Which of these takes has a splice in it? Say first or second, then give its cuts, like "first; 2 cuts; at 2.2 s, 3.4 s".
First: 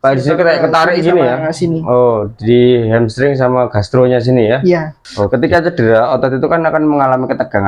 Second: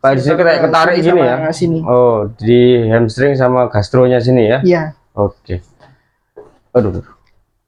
first; 1 cut; at 5.3 s